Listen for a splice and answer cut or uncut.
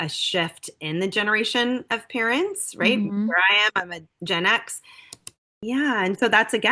cut